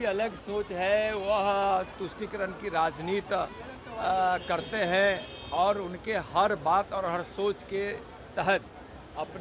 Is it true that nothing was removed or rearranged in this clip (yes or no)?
yes